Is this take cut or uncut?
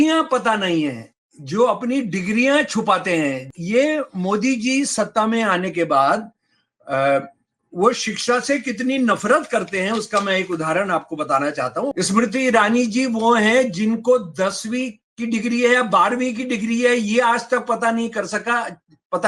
cut